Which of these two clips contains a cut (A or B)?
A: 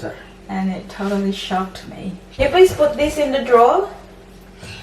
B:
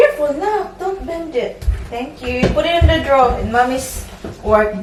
A